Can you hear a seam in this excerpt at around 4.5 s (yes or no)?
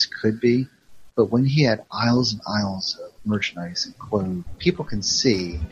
yes